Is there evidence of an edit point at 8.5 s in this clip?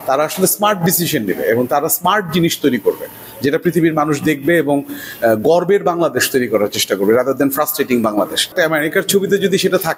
yes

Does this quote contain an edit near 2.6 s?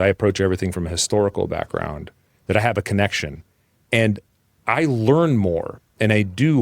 no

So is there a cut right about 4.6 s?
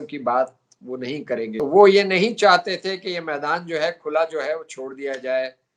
no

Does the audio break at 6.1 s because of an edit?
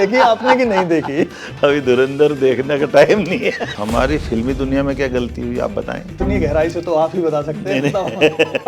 yes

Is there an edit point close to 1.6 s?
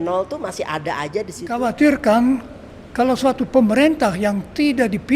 yes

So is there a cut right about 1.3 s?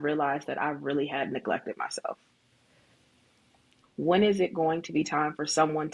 no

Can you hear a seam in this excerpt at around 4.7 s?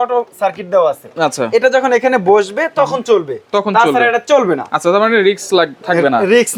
no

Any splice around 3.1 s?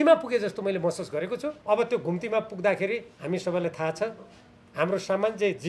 yes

